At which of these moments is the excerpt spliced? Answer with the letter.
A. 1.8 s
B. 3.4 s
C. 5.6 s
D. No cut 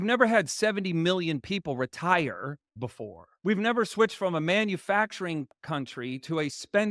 C